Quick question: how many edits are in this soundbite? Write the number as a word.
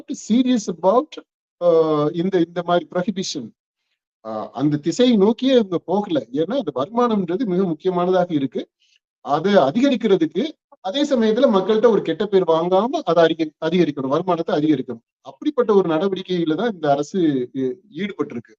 zero